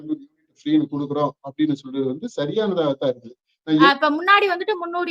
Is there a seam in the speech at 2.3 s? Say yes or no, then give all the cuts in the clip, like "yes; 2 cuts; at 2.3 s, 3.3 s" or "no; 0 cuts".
no; 1 cut; at 3.9 s